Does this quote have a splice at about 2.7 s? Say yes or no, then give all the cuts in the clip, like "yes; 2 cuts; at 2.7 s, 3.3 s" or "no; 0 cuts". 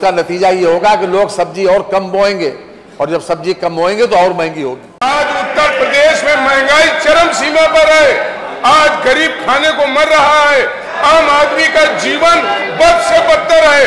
no; 1 cut; at 5.0 s